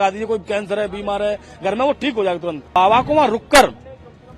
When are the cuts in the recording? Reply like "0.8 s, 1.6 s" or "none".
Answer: 2.8 s